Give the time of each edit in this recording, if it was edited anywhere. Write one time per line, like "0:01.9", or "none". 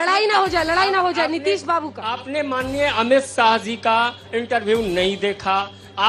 none